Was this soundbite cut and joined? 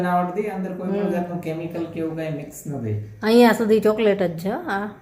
no; 0 cuts

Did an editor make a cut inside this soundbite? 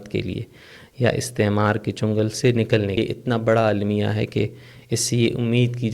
yes; 1 cut; at 3.0 s

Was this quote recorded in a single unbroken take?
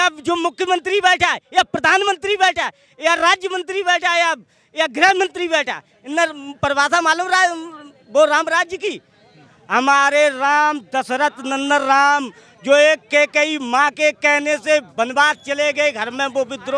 yes; 0 cuts

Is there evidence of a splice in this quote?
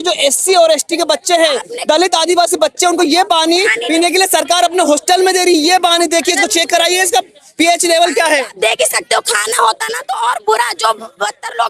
no; 0 cuts

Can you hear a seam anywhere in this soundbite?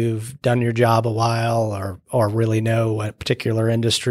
no; 0 cuts

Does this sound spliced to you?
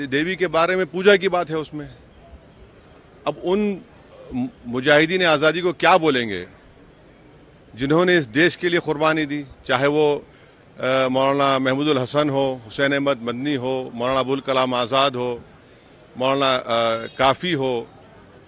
no; 0 cuts

